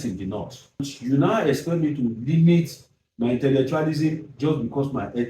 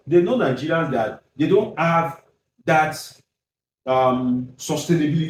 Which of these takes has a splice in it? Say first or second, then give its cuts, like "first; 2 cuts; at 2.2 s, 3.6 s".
first; 1 cut; at 0.9 s